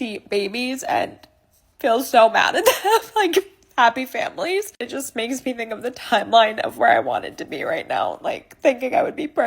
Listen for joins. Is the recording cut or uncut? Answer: cut